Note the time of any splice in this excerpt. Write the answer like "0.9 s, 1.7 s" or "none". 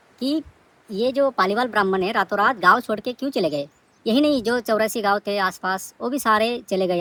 none